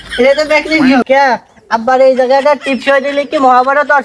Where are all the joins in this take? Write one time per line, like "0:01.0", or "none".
0:01.0

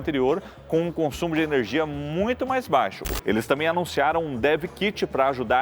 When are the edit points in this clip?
0:03.0

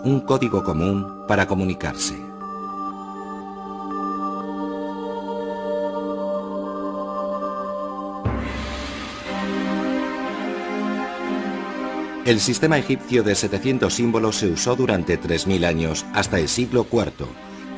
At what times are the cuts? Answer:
0:07.3

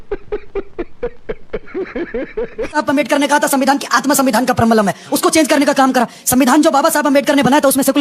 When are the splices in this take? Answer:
0:02.7

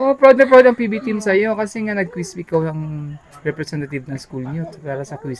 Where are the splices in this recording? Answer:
none

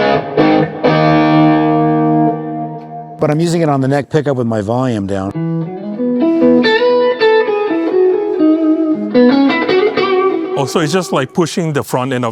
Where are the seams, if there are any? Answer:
none

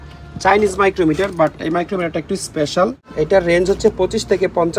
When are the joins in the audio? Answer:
0:03.0

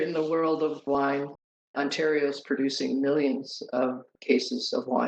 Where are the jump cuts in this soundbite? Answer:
0:01.7

